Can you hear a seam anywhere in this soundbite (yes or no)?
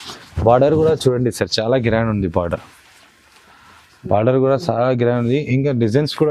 no